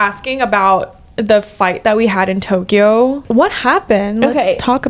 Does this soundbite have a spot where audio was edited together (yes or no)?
yes